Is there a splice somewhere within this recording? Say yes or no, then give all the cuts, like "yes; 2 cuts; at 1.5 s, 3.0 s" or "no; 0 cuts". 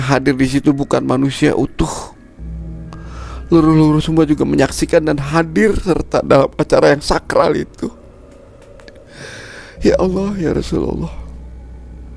yes; 2 cuts; at 2.3 s, 3.2 s